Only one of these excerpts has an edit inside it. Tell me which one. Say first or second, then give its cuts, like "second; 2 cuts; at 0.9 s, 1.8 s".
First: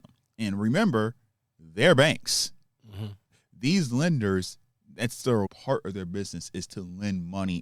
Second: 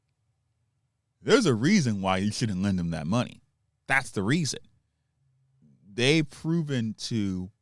first; 2 cuts; at 3.4 s, 5.5 s